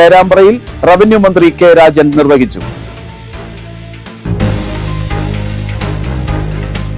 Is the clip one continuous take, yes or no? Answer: yes